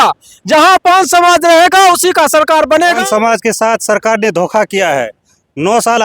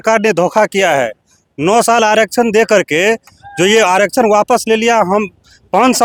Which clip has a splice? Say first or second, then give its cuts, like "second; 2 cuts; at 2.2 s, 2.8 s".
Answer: first; 1 cut; at 3.0 s